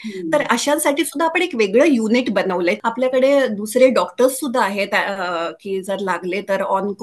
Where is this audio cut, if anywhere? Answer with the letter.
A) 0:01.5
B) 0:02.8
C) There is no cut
B